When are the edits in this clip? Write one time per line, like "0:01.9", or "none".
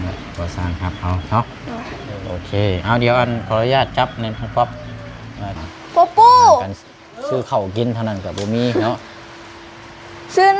0:05.6